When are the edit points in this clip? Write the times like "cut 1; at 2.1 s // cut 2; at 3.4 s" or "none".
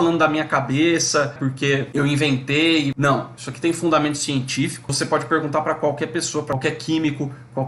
cut 1; at 1.4 s // cut 2; at 2.9 s // cut 3; at 4.9 s // cut 4; at 6.5 s